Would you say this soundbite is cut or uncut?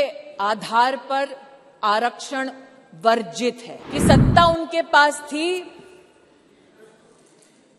cut